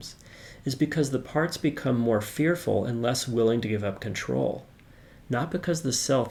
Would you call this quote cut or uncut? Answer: uncut